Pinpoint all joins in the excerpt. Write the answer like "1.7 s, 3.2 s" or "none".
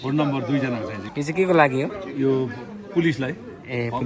1.0 s

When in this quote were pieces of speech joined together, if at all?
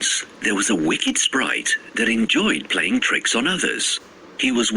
2.4 s

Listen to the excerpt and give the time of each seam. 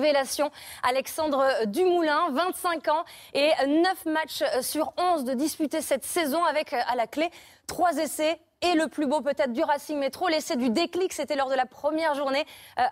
none

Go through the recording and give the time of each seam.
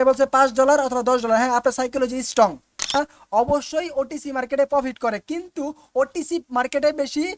2.9 s

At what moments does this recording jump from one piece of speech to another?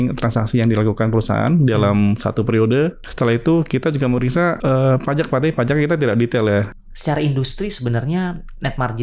3.0 s, 4.6 s, 6.7 s

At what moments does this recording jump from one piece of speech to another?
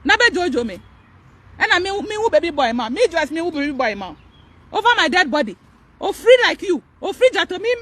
none

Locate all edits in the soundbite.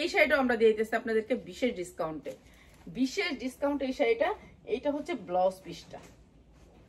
none

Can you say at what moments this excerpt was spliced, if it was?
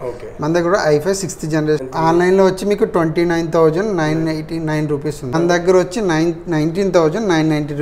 1.9 s, 5.3 s

